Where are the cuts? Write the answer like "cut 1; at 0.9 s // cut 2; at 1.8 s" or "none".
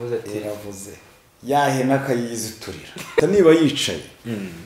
cut 1; at 3.1 s